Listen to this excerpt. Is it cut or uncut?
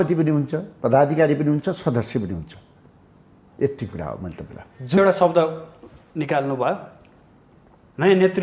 cut